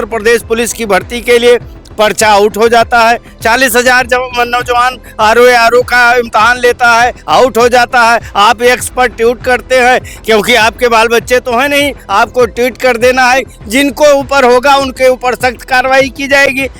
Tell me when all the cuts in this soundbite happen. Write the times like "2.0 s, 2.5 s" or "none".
none